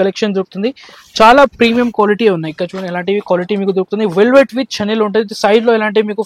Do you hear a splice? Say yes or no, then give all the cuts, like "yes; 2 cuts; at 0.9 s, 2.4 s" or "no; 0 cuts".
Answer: no; 0 cuts